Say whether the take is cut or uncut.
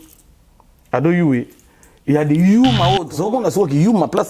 cut